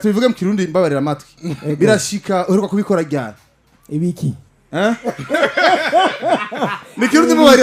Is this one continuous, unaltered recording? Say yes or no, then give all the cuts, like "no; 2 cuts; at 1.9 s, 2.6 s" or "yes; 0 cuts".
yes; 0 cuts